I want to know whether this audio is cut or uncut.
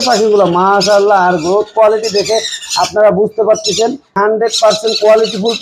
cut